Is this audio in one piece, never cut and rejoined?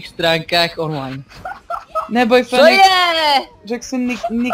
yes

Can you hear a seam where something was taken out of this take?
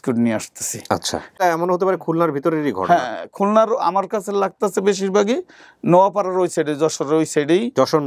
yes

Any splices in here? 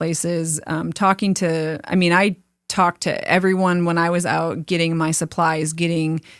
no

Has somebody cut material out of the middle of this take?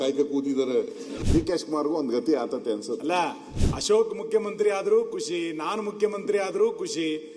yes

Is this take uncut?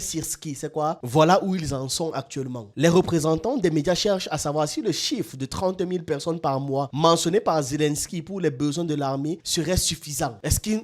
no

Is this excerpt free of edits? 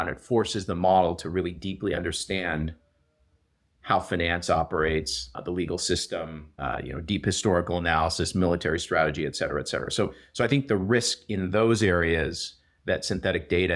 no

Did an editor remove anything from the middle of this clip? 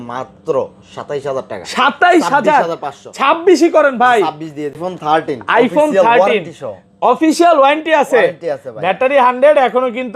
yes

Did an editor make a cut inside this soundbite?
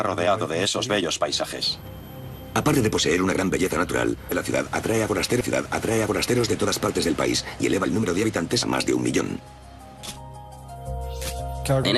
yes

